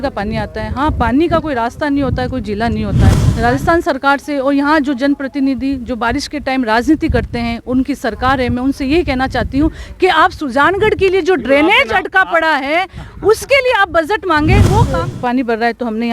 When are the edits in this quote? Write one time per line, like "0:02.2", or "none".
0:03.2
0:14.9